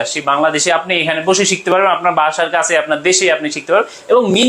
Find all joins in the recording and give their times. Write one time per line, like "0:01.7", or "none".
none